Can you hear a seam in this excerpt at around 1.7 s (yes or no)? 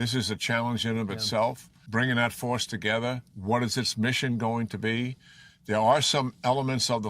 yes